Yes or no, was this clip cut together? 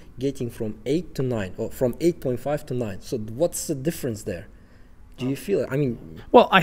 no